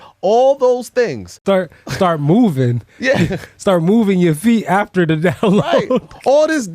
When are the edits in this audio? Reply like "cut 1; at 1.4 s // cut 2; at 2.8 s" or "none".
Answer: cut 1; at 1.3 s